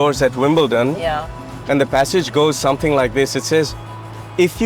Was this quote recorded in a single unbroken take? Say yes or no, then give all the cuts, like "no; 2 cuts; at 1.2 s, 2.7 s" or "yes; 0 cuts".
yes; 0 cuts